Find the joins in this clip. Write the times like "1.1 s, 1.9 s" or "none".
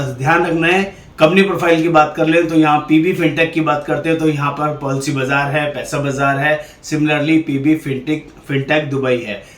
1.0 s